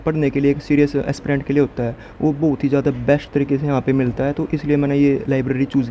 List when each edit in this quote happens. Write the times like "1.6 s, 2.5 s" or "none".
none